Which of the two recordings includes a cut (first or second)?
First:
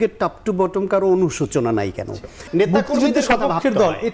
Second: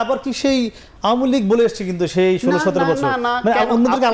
first